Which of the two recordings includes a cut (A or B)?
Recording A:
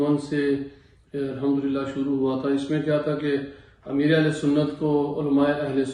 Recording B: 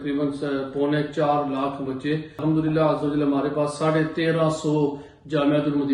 B